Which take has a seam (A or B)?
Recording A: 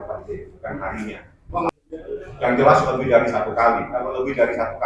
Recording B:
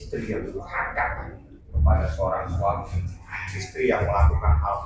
A